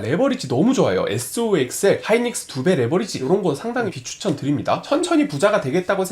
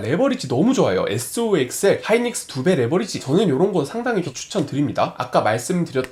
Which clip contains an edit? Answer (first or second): first